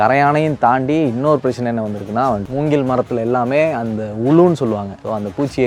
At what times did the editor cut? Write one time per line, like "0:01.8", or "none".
0:02.4

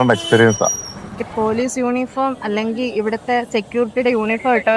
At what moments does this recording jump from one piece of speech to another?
0:01.2

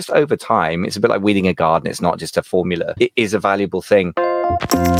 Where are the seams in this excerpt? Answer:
0:03.0
0:04.1

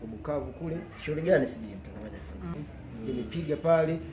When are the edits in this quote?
0:02.5

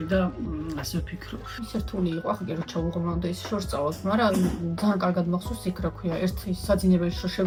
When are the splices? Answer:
none

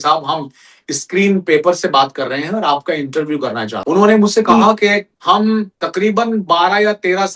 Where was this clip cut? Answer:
0:03.7
0:05.1
0:05.8

